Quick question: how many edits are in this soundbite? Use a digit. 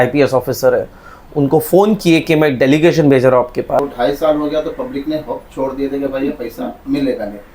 1